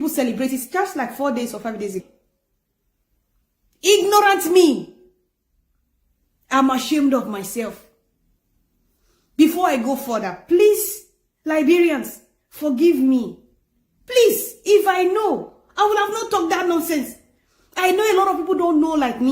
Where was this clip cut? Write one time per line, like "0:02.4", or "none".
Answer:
0:02.0